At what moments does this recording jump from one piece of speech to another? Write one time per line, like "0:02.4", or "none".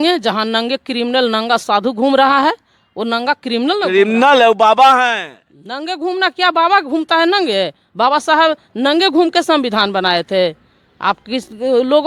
none

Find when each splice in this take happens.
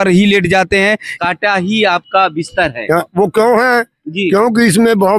0:01.1

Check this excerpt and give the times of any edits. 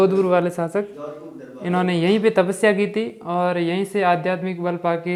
none

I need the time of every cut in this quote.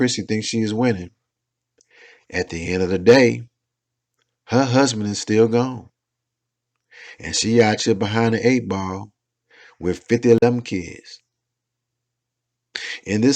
none

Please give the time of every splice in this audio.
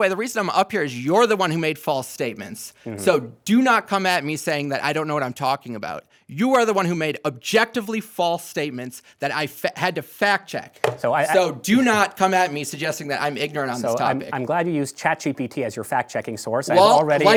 none

